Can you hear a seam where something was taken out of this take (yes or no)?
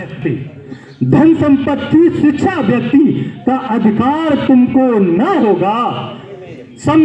no